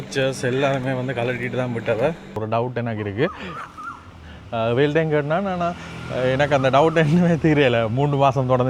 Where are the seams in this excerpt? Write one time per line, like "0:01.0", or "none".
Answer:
0:02.3